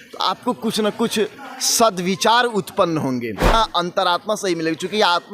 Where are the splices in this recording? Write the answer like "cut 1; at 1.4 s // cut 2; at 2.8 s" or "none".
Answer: cut 1; at 3.5 s